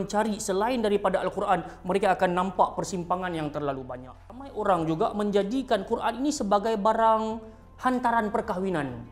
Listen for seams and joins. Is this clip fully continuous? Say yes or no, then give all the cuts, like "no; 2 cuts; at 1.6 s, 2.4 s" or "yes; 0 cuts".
no; 1 cut; at 4.5 s